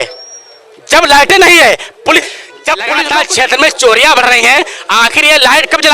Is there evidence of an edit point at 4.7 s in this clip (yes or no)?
no